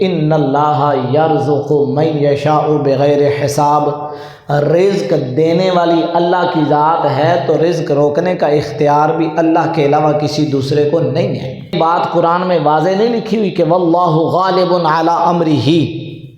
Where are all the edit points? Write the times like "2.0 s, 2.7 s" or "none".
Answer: 11.8 s

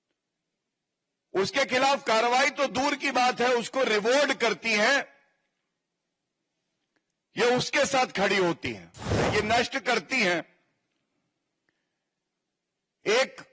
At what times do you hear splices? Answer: 9.1 s

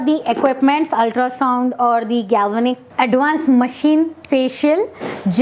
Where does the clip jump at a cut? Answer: 2.8 s

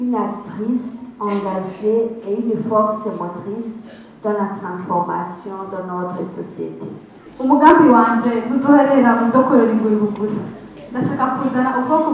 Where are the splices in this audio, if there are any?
7.3 s

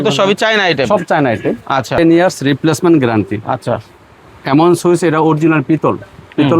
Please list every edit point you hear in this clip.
2.0 s

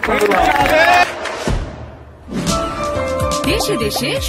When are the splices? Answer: none

